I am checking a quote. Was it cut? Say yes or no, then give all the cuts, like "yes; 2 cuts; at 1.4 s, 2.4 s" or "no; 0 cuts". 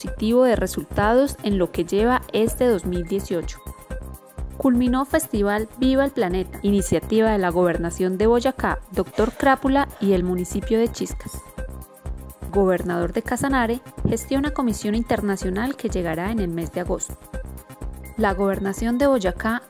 no; 0 cuts